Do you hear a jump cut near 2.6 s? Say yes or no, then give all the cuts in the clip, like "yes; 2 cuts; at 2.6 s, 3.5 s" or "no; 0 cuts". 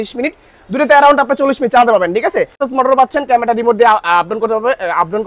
yes; 1 cut; at 2.6 s